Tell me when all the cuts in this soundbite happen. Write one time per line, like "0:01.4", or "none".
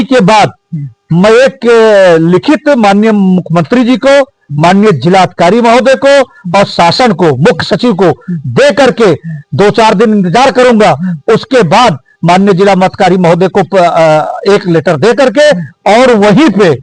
none